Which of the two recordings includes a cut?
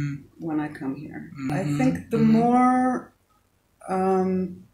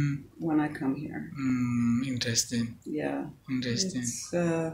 first; 1 cut; at 1.4 s

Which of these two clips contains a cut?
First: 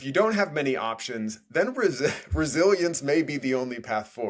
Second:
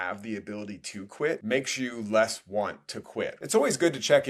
second; 2 cuts; at 1.4 s, 3.3 s

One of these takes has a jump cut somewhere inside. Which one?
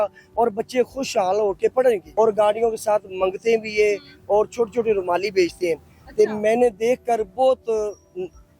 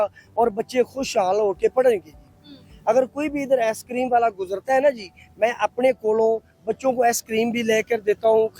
first; 1 cut; at 2.1 s

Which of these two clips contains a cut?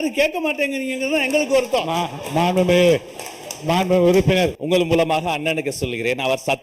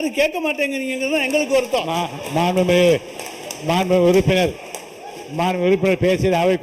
first; 1 cut; at 4.6 s

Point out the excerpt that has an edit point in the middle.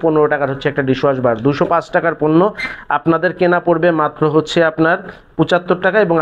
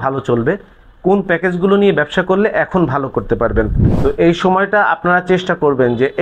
second; 1 cut; at 3.8 s

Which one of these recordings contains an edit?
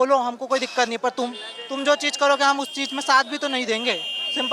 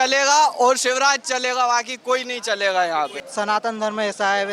second; 1 cut; at 3.2 s

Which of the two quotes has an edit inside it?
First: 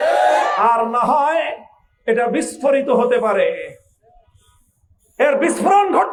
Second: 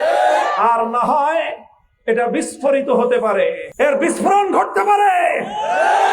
second; 1 cut; at 3.6 s

